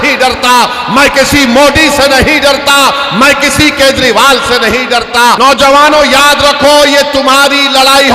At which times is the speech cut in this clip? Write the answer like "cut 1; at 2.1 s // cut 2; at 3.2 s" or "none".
cut 1; at 5.4 s